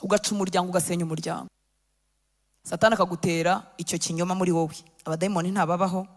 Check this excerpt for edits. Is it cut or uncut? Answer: cut